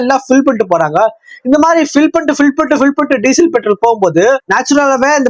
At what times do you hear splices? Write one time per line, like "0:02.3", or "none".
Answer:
none

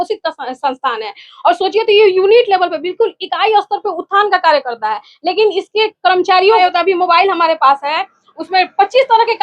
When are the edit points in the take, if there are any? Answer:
0:06.6

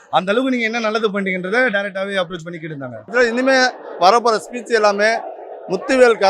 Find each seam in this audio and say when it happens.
0:03.0

